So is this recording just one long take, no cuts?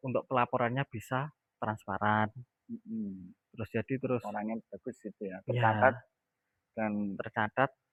yes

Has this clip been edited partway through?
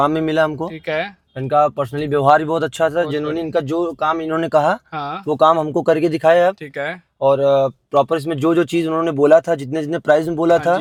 no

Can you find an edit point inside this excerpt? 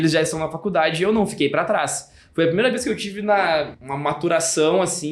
yes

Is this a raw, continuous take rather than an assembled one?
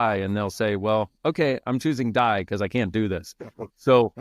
yes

